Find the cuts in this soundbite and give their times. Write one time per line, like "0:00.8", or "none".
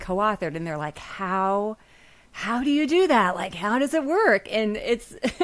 none